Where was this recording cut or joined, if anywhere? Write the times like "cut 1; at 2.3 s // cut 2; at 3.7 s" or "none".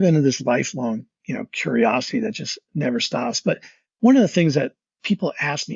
cut 1; at 4.9 s